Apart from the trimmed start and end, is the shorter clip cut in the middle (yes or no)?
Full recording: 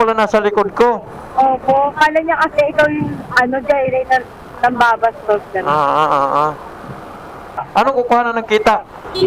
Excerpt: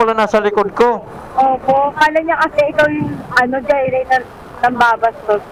no